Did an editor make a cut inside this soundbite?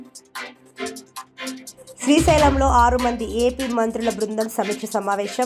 yes; 1 cut; at 1.7 s

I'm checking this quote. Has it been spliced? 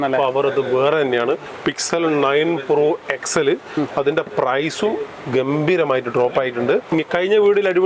yes; 2 cuts; at 1.5 s, 6.9 s

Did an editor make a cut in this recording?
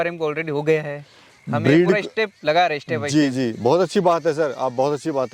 no; 0 cuts

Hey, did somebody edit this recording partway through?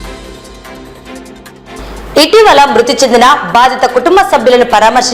yes; 1 cut; at 1.7 s

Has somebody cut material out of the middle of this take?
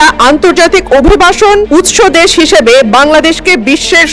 yes; 1 cut; at 1.7 s

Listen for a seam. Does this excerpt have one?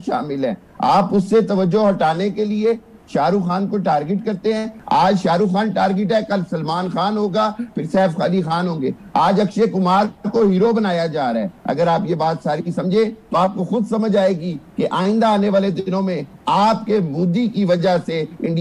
no; 0 cuts

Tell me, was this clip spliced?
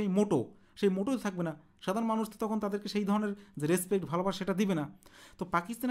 no; 0 cuts

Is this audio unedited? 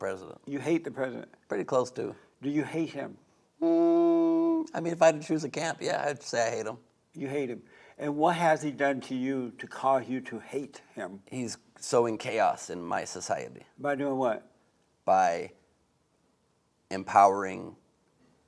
yes; 0 cuts

